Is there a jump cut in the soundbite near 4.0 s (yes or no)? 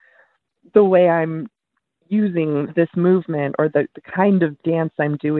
no